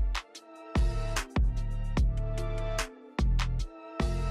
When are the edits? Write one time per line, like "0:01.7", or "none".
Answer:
none